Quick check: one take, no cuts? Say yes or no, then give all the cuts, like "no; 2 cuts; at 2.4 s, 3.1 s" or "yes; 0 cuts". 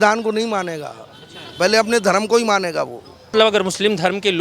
no; 1 cut; at 3.3 s